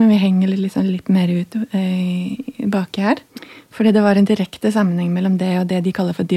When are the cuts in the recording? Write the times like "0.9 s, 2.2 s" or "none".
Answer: 3.2 s